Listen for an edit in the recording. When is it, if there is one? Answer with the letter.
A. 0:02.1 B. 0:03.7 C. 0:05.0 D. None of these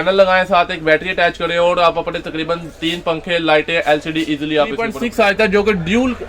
C